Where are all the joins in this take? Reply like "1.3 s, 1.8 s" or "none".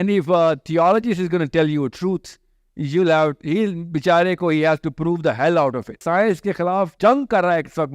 6.0 s, 6.9 s